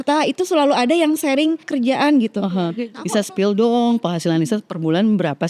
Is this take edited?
yes; 2 cuts; at 1.7 s, 2.9 s

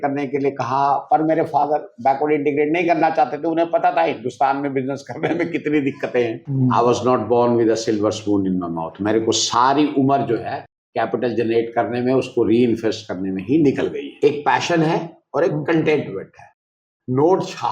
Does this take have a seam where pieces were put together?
yes; 2 cuts; at 6.4 s, 14.1 s

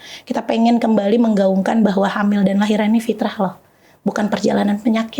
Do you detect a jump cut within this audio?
no; 0 cuts

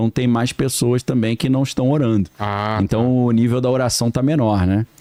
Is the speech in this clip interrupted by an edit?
no; 0 cuts

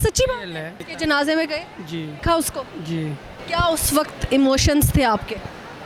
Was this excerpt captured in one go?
no; 3 cuts; at 0.9 s, 2.1 s, 3.4 s

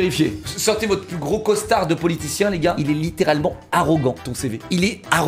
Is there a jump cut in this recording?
yes; 1 cut; at 2.8 s

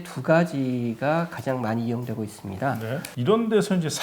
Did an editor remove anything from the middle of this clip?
yes; 1 cut; at 3.1 s

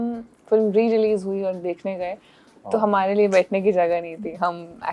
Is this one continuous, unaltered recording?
yes; 0 cuts

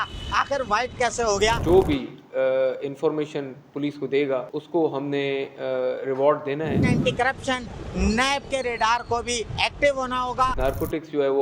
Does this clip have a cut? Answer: yes; 4 cuts; at 1.6 s, 4.6 s, 6.8 s, 10.6 s

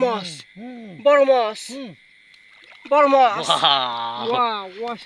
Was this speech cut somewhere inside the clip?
no; 0 cuts

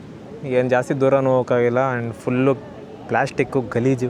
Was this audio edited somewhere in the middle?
no; 0 cuts

